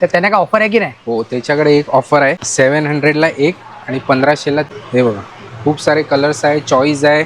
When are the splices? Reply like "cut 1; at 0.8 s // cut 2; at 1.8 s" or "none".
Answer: cut 1; at 2.4 s // cut 2; at 4.7 s